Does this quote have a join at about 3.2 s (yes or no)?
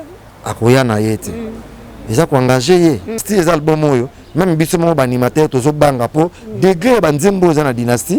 yes